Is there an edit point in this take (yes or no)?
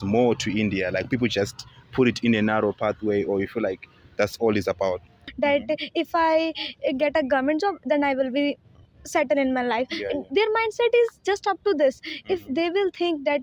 yes